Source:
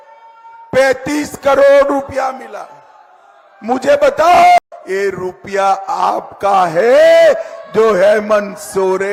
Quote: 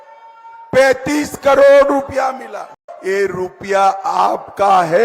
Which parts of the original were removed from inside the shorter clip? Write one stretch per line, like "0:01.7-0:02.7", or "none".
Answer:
0:02.9-0:04.8